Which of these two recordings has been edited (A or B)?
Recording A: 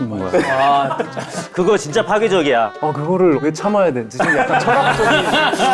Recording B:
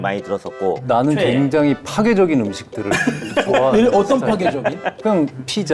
A